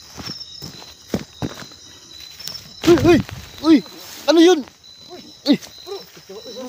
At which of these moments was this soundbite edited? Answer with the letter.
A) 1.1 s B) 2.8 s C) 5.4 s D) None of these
B